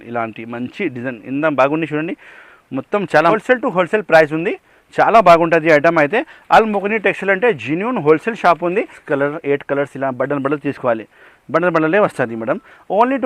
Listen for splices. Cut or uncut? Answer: cut